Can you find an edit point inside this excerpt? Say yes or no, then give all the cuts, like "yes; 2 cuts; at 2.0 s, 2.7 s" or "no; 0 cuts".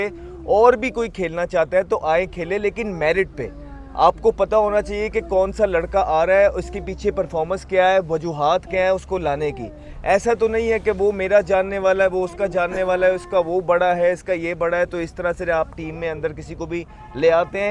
no; 0 cuts